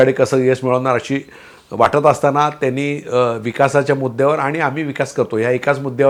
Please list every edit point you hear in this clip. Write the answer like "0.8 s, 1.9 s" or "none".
none